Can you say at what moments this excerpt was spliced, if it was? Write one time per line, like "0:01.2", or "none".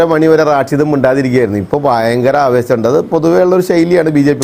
none